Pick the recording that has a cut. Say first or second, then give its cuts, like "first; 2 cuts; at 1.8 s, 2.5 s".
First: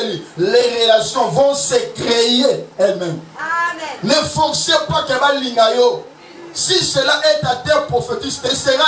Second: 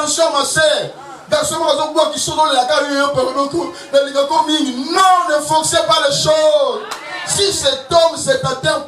first; 1 cut; at 3.4 s